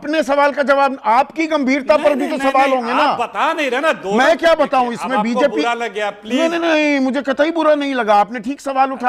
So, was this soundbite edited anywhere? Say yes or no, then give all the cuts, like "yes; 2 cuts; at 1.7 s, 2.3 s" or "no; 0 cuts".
no; 0 cuts